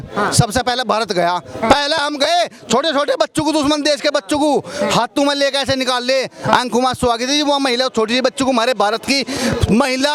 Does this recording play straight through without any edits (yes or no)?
yes